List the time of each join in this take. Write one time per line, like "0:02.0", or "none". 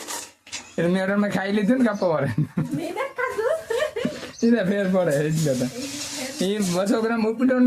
none